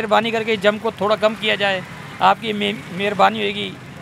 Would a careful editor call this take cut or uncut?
uncut